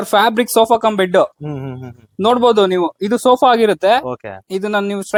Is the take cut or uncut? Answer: uncut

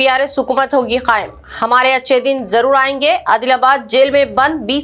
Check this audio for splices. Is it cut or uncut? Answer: uncut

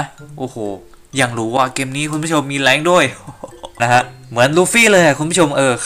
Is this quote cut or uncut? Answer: cut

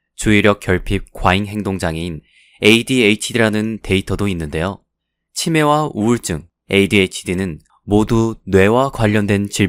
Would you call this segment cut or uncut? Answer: uncut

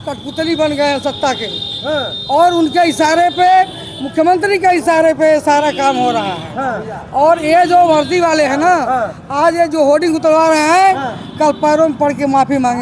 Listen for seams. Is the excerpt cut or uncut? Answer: uncut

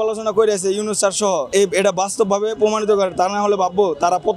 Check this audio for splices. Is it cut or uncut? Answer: cut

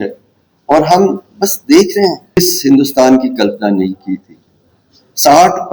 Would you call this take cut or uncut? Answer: cut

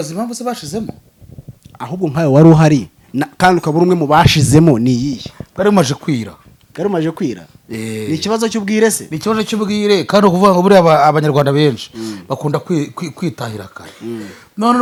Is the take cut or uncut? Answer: uncut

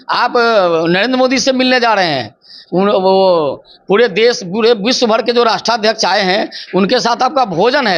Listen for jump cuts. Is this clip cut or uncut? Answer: uncut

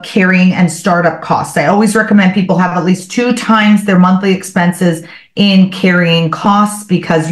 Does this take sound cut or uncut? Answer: uncut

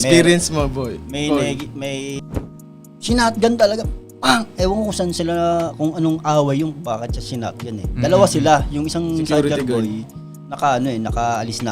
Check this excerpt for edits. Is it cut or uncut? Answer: cut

